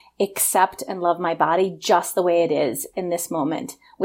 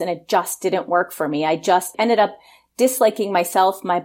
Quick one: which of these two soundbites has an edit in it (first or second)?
second